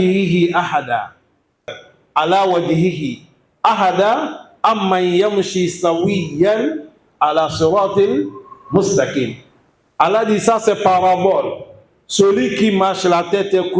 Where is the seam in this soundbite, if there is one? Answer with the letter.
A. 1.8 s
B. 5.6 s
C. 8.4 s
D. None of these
A